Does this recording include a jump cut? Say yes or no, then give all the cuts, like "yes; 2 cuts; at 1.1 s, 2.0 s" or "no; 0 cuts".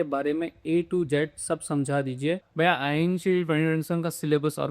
yes; 1 cut; at 2.5 s